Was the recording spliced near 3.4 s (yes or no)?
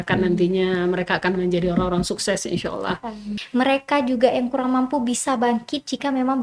yes